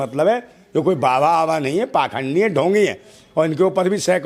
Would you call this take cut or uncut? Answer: uncut